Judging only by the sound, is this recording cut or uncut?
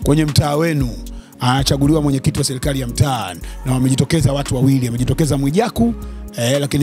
uncut